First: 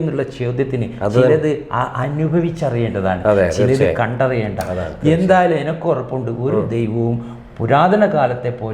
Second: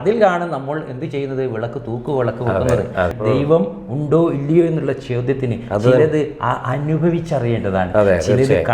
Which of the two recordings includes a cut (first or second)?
second